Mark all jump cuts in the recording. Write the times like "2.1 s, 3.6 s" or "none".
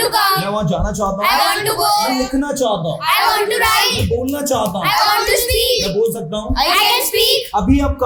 none